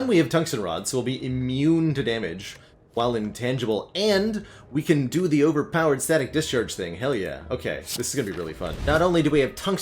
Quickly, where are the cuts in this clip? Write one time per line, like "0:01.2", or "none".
0:08.8